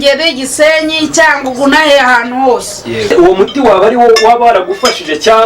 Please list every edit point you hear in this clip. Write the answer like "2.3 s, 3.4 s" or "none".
3.1 s